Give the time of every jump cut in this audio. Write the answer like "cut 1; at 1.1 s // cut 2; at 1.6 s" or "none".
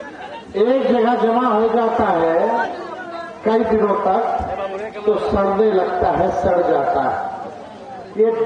none